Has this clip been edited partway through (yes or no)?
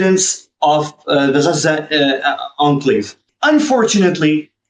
yes